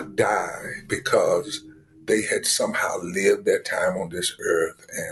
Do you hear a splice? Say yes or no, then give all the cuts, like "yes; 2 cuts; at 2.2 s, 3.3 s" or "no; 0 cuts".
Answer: no; 0 cuts